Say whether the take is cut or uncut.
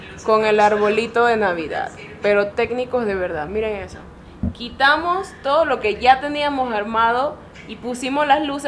uncut